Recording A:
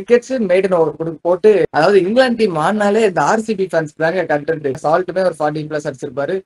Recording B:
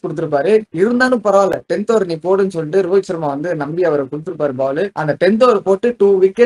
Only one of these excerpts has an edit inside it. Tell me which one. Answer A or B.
A